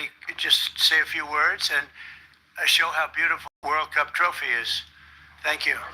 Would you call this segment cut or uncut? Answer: cut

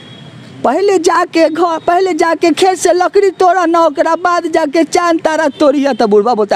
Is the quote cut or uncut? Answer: uncut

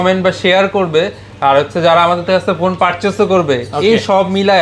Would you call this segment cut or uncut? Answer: uncut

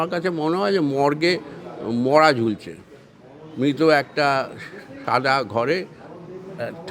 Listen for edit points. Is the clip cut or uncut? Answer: uncut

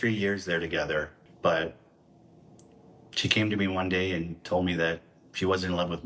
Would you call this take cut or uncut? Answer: cut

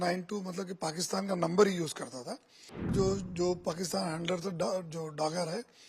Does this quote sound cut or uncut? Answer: cut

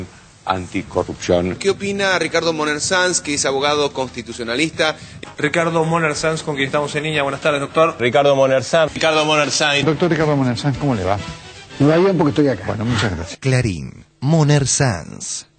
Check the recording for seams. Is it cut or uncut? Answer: cut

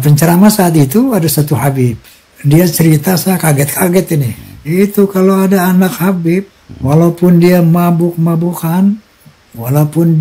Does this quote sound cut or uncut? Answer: uncut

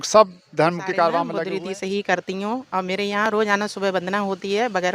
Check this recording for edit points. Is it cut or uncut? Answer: cut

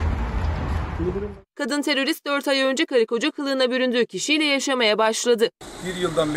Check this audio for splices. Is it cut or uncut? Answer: cut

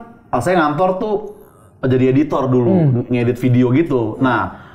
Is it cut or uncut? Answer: uncut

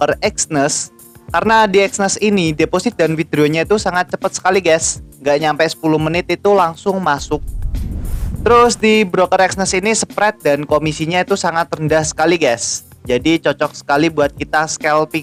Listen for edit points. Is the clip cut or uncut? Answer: uncut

